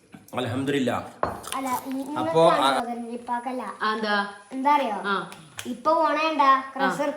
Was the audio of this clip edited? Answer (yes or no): yes